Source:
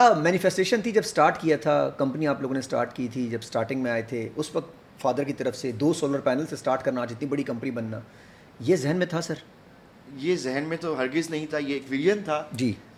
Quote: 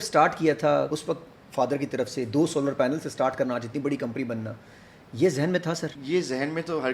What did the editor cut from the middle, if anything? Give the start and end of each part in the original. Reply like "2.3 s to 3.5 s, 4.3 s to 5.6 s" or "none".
1.9 s to 4.4 s, 9.4 s to 10.1 s